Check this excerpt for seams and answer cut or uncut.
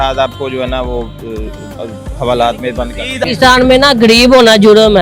cut